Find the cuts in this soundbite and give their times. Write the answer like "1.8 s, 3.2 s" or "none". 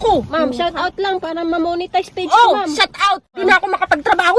3.4 s